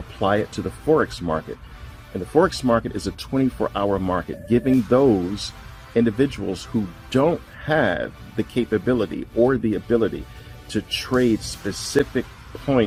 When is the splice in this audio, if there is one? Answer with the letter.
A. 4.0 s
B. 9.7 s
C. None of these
C